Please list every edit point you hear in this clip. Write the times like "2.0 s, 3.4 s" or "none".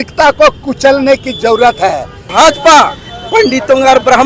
2.3 s